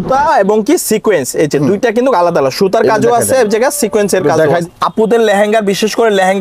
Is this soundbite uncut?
no; 1 cut; at 4.6 s

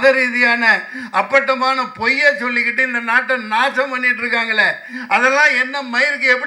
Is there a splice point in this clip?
no; 0 cuts

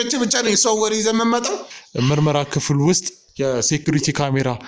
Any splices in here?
yes; 1 cut; at 1.6 s

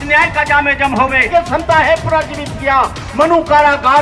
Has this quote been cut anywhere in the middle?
yes; 1 cut; at 1.3 s

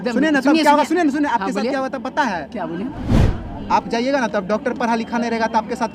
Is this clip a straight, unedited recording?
yes; 0 cuts

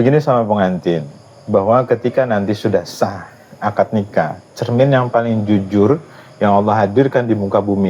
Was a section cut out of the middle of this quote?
no; 0 cuts

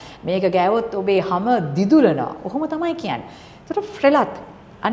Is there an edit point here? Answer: no; 0 cuts

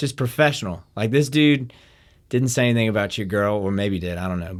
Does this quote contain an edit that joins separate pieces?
no; 0 cuts

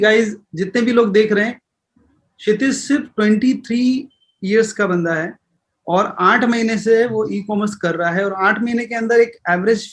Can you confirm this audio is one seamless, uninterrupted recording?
yes; 0 cuts

